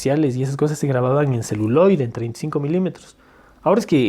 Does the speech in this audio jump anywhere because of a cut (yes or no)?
no